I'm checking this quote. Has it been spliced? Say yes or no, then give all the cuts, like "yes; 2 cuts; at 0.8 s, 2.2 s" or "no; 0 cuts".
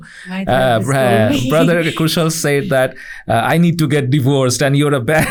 no; 0 cuts